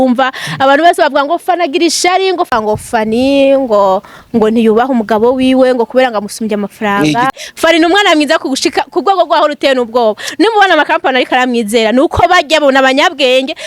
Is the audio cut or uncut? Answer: cut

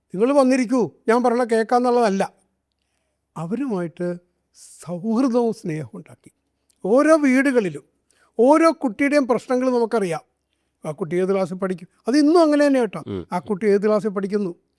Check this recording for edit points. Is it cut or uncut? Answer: uncut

